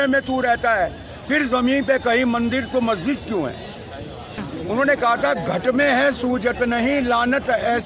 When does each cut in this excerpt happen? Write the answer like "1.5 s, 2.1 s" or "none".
4.5 s